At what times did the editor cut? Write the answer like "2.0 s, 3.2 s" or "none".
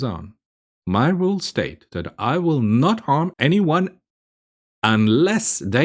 3.3 s